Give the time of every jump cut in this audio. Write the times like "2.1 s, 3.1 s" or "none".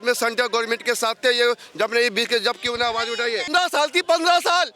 3.5 s